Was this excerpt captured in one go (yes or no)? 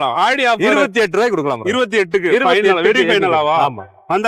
yes